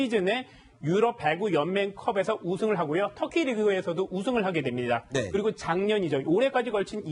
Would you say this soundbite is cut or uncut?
cut